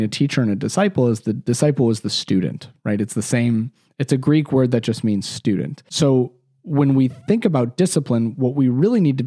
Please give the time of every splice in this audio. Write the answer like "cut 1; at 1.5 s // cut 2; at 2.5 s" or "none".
cut 1; at 5.9 s